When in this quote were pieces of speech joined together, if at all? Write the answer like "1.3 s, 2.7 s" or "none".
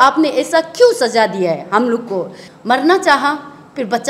2.4 s